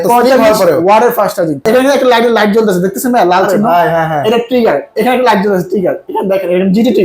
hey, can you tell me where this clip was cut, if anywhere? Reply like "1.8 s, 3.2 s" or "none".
1.6 s